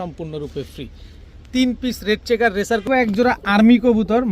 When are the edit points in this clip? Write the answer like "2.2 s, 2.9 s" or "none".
2.9 s